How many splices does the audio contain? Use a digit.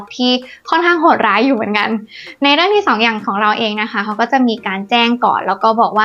0